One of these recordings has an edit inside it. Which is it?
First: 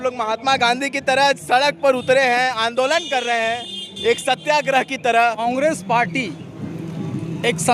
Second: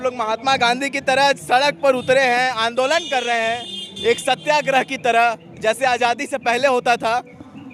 first; 1 cut; at 5.4 s

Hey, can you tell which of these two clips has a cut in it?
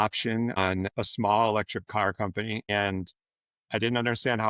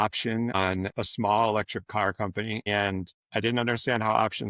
second; 1 cut; at 3.2 s

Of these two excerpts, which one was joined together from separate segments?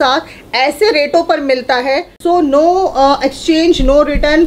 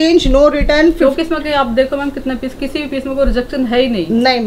first; 1 cut; at 2.1 s

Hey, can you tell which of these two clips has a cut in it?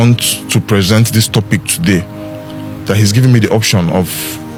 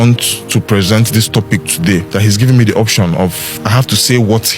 second; 2 cuts; at 2.1 s, 3.5 s

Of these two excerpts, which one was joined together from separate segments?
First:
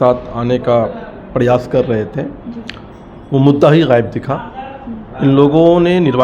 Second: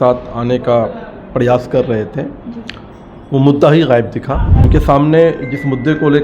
second; 1 cut; at 4.6 s

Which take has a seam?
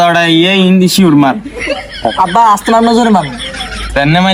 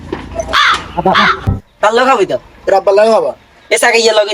second; 1 cut; at 1.5 s

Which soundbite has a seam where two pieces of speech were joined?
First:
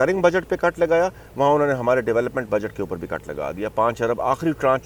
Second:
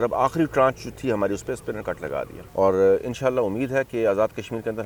second; 1 cut; at 2.4 s

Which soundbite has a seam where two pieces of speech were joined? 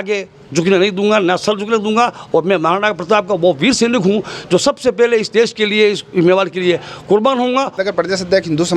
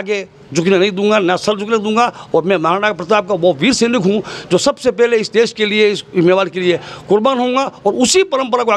first; 1 cut; at 7.8 s

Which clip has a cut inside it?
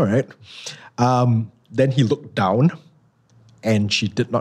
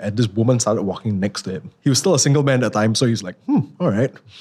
second; 1 cut; at 1.7 s

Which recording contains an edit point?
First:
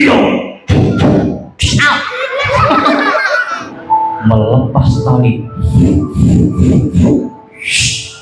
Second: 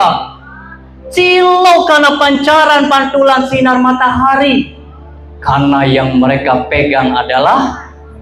first; 1 cut; at 3.7 s

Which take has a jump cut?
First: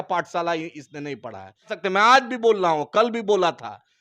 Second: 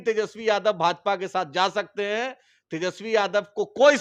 first; 1 cut; at 1.7 s

